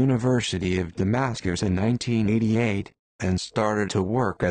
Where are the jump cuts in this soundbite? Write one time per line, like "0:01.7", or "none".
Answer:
none